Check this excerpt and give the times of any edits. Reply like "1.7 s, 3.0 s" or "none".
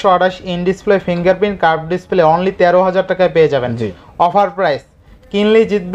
none